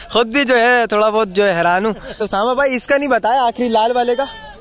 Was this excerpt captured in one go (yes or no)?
no